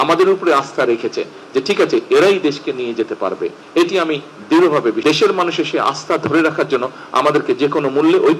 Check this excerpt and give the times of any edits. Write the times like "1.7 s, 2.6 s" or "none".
5.0 s